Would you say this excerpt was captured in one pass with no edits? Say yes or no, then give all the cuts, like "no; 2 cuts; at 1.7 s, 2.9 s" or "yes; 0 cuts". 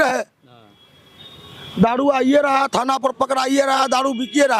yes; 0 cuts